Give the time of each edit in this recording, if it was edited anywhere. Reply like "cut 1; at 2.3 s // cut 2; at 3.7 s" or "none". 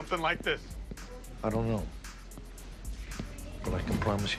none